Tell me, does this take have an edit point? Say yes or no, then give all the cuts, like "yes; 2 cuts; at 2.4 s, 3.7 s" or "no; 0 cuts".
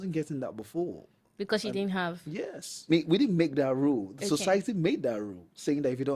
yes; 1 cut; at 2.8 s